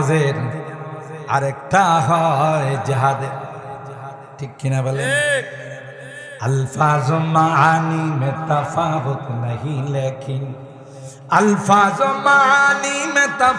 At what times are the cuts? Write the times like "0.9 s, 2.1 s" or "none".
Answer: none